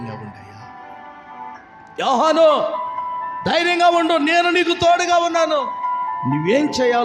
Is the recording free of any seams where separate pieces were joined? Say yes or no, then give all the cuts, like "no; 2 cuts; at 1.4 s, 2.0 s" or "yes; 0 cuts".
yes; 0 cuts